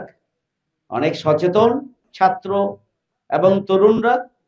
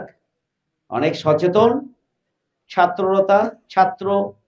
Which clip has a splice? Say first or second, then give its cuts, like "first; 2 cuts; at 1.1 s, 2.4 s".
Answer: first; 1 cut; at 2.0 s